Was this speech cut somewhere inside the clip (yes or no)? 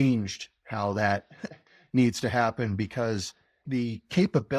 yes